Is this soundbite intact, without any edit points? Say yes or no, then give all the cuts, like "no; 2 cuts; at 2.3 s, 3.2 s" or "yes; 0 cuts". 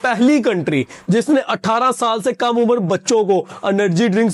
yes; 0 cuts